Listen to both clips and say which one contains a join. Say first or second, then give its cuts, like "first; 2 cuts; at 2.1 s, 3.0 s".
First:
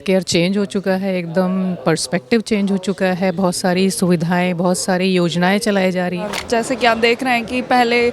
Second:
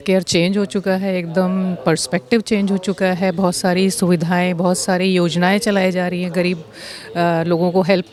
first; 1 cut; at 6.3 s